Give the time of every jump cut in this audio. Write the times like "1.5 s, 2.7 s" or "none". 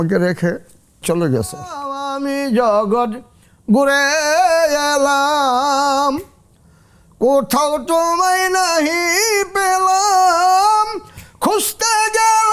1.0 s, 2.0 s